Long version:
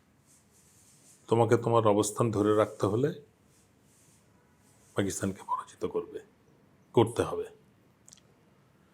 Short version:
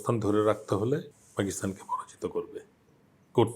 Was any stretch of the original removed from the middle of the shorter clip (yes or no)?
yes